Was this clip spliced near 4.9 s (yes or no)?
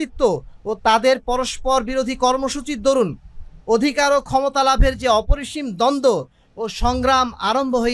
no